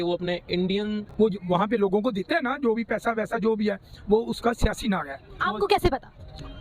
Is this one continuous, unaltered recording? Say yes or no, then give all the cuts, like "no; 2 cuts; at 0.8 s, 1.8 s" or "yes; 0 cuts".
no; 1 cut; at 1.1 s